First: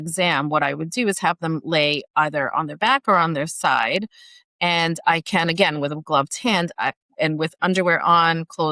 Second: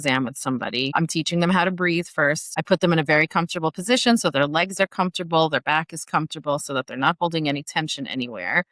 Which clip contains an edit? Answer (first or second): second